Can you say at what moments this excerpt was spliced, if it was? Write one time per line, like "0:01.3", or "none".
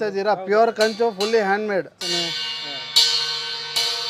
0:02.0